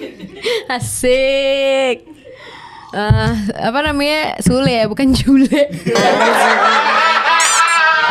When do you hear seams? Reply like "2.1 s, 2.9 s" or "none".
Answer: none